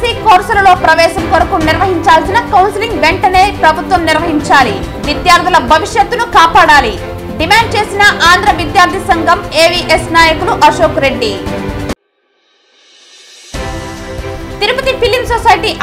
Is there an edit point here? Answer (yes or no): no